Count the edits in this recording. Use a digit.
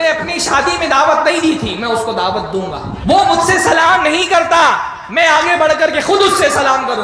1